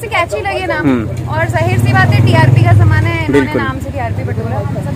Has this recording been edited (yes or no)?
no